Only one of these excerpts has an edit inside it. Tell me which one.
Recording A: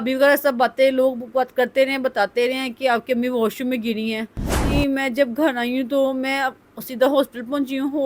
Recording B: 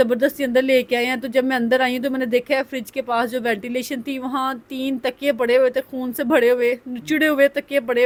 A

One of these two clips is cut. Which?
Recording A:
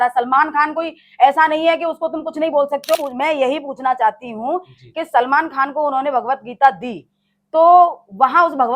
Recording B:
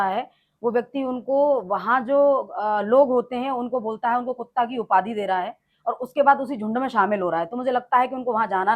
A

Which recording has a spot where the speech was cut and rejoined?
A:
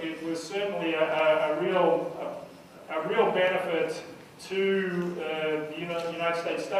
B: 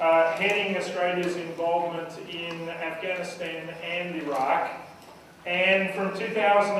B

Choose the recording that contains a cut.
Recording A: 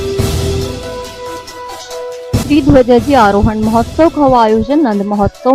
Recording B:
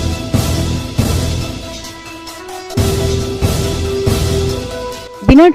A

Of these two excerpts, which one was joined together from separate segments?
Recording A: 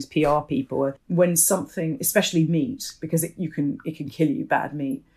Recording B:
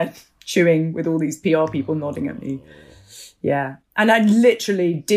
A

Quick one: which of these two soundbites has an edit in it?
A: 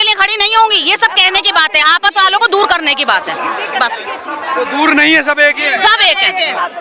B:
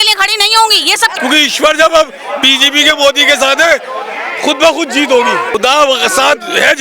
B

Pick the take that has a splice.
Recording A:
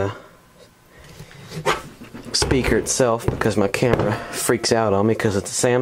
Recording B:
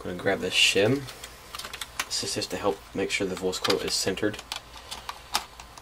B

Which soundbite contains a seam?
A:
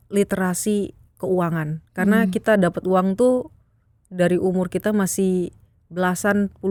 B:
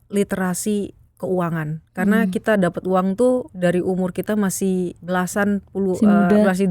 B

